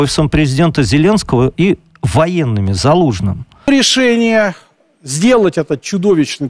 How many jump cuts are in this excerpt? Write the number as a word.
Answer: one